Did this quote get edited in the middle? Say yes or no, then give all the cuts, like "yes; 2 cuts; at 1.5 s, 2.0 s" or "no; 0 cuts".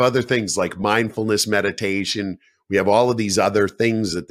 no; 0 cuts